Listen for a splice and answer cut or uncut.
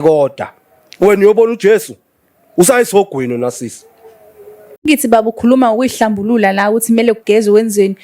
cut